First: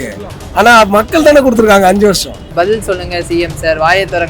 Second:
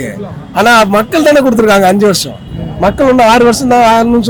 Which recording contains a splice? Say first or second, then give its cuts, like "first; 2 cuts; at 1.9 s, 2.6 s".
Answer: first; 1 cut; at 2.4 s